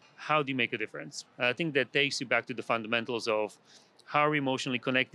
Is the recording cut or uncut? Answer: uncut